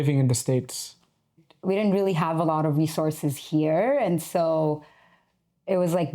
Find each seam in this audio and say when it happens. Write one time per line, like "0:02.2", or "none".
0:01.5